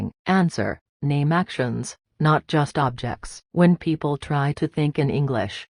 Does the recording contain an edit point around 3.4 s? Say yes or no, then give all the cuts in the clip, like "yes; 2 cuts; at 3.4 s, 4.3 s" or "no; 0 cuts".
no; 0 cuts